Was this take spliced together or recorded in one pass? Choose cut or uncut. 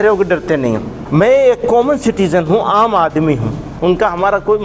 cut